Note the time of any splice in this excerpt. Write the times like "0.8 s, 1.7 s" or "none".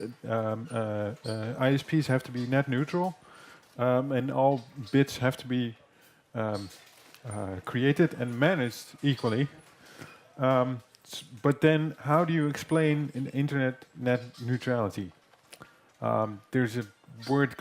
16.6 s